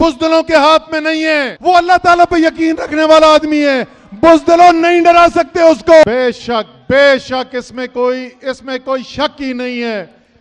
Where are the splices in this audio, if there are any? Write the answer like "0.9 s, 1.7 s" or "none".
1.5 s, 6.0 s